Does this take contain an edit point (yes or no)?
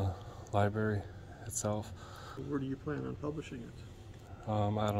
yes